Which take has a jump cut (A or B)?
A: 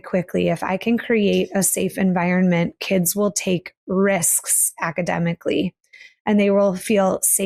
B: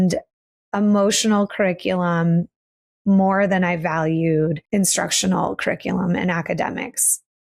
B